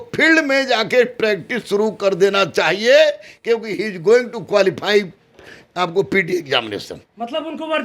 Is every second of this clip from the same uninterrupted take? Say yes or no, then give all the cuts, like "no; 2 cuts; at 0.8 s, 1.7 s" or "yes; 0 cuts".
yes; 0 cuts